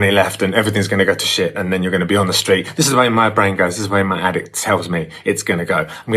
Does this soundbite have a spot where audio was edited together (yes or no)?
no